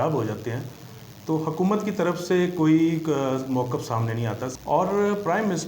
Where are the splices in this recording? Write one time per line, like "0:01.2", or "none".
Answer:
0:04.5

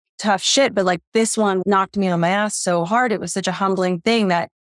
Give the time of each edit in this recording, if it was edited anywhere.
0:01.6

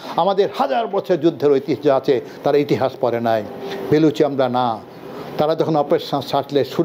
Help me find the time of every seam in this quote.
none

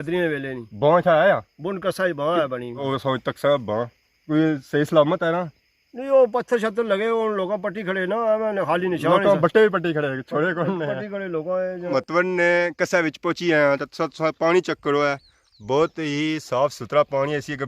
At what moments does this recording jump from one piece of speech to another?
0:02.8
0:11.9

